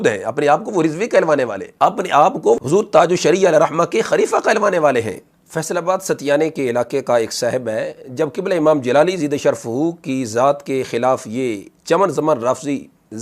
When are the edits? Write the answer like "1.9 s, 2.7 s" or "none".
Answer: 1.6 s